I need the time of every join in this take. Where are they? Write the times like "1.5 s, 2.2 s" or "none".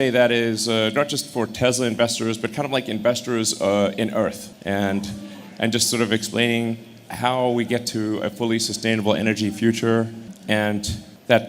10.3 s